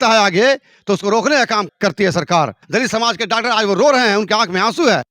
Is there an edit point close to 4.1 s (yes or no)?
no